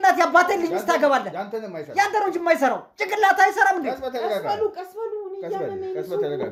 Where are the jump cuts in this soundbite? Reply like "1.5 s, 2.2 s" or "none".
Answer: none